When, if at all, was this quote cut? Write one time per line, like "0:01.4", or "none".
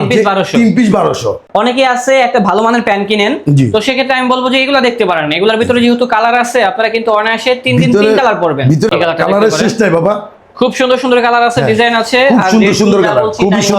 0:01.3
0:08.9

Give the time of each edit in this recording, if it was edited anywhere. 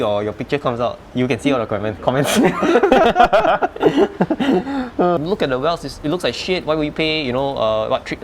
0:05.2

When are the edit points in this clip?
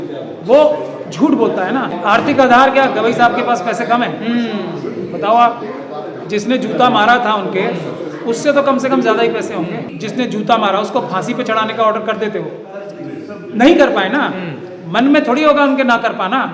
0:01.9
0:09.9

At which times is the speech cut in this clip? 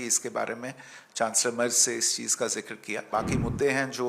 0:03.0

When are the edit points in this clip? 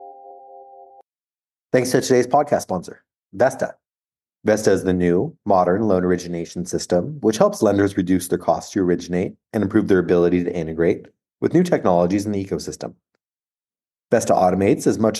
0:01.0

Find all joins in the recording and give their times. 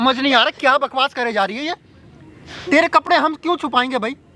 none

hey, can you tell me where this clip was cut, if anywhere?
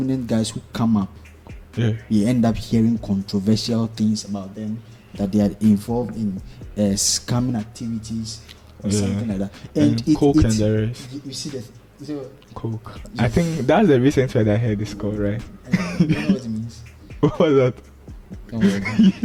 none

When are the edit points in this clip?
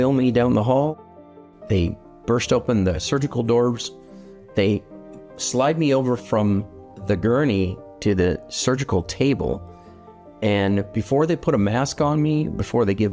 0:00.9

